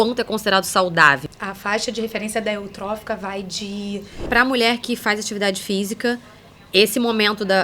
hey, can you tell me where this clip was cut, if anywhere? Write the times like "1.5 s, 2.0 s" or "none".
1.2 s, 4.2 s